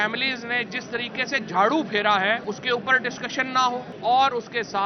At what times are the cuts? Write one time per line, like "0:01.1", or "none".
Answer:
0:02.4
0:03.9